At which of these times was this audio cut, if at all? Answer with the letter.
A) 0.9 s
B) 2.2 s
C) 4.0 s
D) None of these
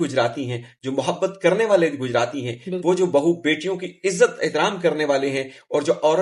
D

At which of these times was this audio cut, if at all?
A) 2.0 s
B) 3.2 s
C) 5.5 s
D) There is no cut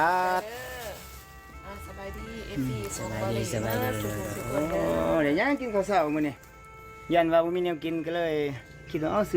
D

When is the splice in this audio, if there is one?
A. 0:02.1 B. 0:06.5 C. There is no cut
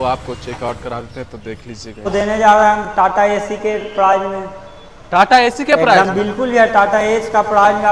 A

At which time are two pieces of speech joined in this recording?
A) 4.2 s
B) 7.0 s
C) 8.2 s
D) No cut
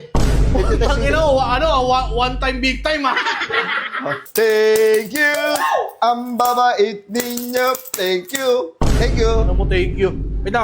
A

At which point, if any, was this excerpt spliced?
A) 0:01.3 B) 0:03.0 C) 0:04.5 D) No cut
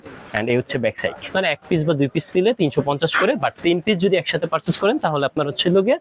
A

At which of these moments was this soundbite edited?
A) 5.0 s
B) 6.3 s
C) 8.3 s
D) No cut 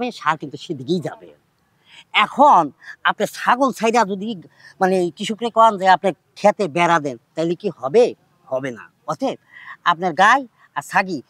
D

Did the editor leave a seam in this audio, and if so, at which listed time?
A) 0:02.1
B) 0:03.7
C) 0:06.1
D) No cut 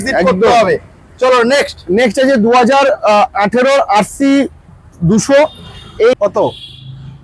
C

